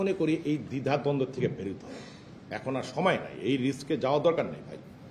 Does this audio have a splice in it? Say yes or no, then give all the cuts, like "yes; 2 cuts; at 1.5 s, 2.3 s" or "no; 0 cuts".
no; 0 cuts